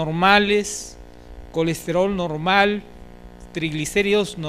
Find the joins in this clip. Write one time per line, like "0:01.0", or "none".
0:02.5